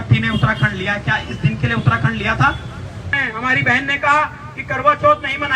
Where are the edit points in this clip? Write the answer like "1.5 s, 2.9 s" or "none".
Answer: 3.1 s

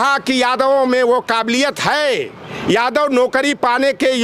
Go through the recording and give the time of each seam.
none

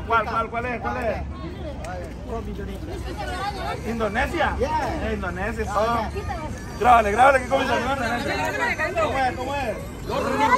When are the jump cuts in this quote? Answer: none

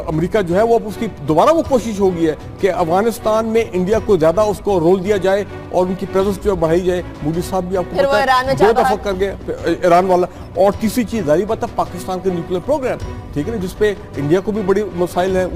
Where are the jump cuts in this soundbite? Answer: none

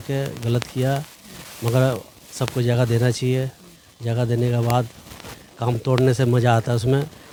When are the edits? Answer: none

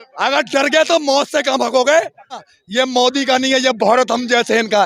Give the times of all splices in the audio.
2.6 s

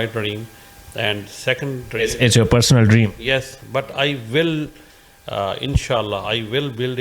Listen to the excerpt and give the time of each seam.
none

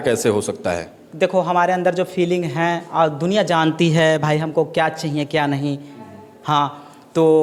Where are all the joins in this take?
none

